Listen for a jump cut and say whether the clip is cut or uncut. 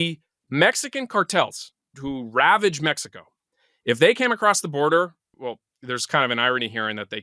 cut